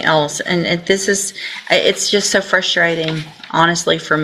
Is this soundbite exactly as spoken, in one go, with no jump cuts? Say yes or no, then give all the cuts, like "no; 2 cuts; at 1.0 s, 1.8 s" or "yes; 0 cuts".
yes; 0 cuts